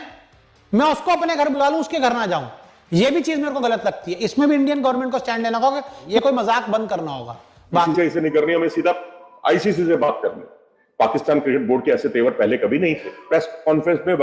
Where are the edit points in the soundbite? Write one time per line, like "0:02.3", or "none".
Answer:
0:06.0
0:07.8
0:13.2